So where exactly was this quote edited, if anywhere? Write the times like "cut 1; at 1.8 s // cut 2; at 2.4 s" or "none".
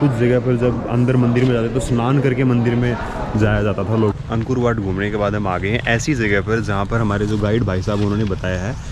cut 1; at 4.1 s